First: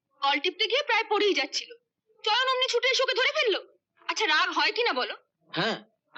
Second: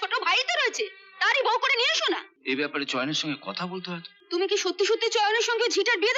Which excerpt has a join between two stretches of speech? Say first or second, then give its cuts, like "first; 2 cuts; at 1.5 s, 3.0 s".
second; 2 cuts; at 2.3 s, 4.1 s